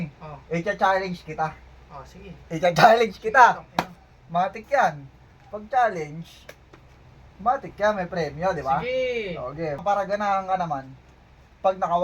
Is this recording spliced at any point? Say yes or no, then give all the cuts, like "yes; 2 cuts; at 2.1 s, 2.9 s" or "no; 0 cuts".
yes; 1 cut; at 9.8 s